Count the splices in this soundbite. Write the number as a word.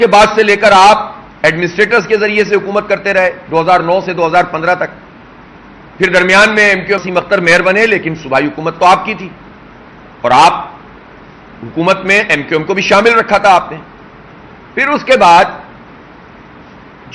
one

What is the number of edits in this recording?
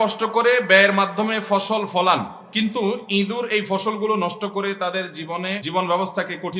two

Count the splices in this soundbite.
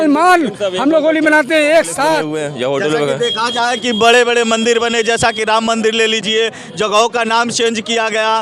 one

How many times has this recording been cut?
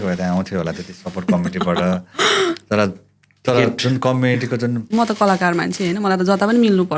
one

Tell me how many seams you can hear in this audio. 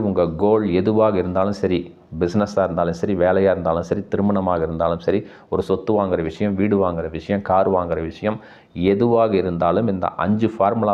zero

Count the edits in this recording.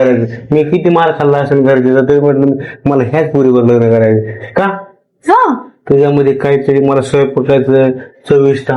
zero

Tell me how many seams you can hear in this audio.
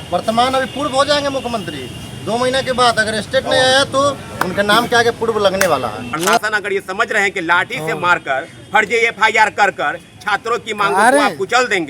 one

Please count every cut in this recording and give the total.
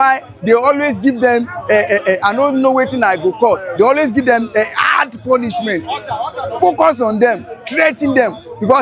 zero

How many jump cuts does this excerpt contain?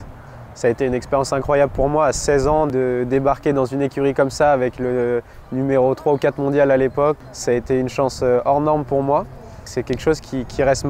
two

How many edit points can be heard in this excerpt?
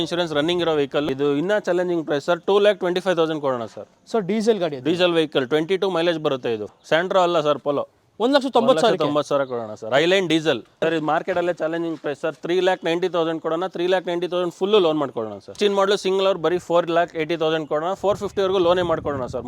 four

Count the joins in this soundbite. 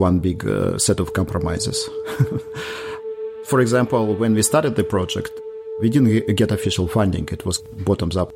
zero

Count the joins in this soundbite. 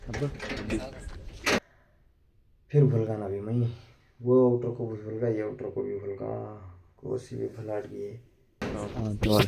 two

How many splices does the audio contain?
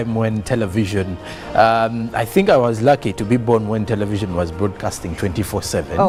zero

